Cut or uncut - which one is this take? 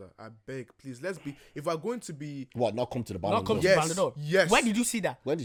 uncut